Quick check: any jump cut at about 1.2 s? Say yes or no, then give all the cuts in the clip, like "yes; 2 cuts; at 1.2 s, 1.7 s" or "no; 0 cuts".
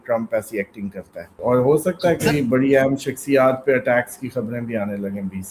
yes; 1 cut; at 1.2 s